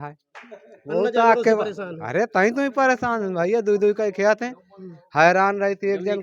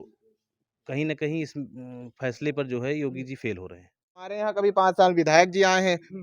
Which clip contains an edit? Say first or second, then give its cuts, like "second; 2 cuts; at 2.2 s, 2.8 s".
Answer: second; 1 cut; at 4.4 s